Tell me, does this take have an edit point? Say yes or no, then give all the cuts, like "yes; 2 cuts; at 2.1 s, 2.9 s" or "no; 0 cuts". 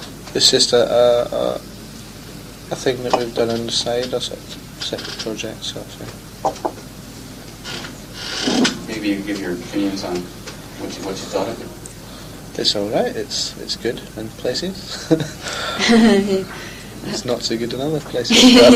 no; 0 cuts